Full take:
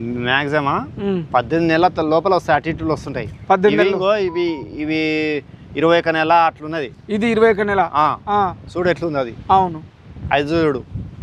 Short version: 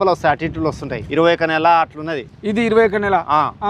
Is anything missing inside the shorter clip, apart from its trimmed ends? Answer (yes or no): yes